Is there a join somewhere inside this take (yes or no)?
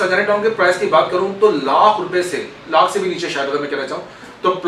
no